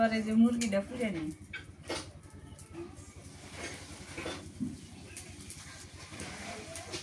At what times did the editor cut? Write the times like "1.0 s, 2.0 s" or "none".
none